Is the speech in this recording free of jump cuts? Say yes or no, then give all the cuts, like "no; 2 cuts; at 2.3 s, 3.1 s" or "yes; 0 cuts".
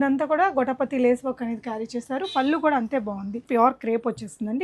no; 1 cut; at 3.4 s